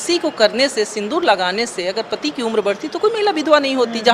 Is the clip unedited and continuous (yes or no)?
yes